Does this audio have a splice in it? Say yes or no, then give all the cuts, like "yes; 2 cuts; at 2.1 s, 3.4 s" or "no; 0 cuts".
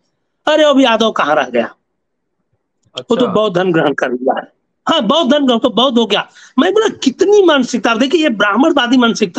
no; 0 cuts